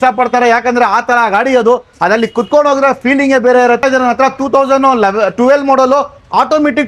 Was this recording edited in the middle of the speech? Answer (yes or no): yes